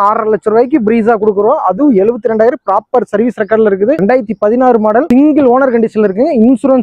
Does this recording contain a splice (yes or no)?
no